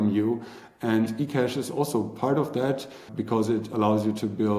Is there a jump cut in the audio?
yes; 1 cut; at 3.1 s

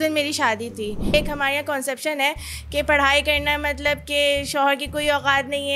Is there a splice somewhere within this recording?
yes; 1 cut; at 1.1 s

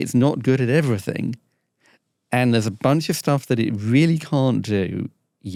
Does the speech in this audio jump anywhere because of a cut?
no; 0 cuts

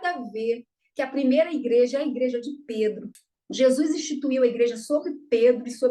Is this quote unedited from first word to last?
no; 1 cut; at 3.1 s

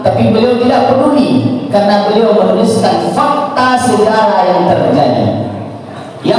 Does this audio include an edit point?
no; 0 cuts

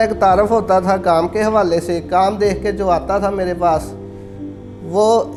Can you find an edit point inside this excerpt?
no; 0 cuts

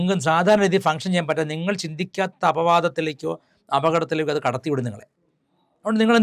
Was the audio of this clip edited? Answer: no; 0 cuts

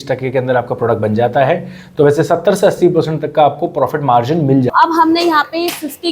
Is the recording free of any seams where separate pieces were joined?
no; 1 cut; at 4.7 s

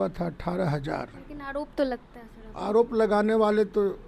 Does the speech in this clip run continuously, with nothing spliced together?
no; 1 cut; at 1.3 s

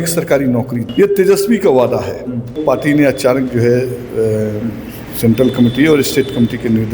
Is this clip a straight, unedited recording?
no; 2 cuts; at 0.8 s, 2.6 s

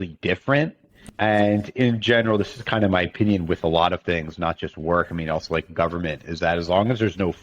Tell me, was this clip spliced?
yes; 1 cut; at 1.0 s

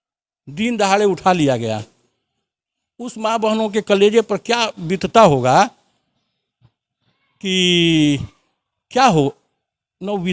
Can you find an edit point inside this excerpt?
no; 0 cuts

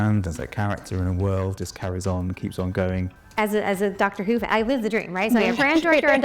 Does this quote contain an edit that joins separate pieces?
yes; 1 cut; at 3.2 s

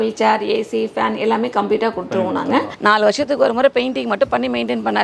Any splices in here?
yes; 1 cut; at 2.7 s

